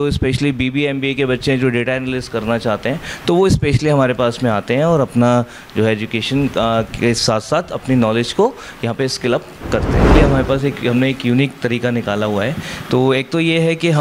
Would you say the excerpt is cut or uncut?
cut